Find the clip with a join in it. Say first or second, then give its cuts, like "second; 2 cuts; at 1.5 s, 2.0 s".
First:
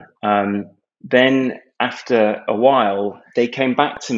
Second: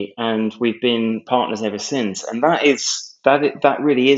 first; 1 cut; at 3.2 s